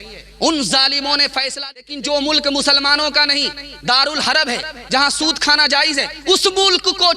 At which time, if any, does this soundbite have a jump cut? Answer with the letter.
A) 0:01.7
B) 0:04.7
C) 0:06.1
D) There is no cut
A